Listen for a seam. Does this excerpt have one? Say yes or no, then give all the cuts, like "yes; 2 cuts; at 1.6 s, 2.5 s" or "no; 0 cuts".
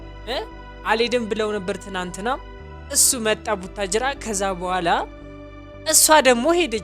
no; 0 cuts